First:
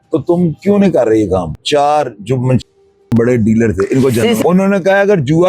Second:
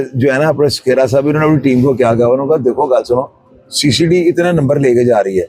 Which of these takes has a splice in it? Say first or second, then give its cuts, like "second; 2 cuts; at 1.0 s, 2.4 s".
first; 2 cuts; at 1.6 s, 4.4 s